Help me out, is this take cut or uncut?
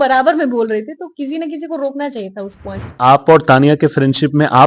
cut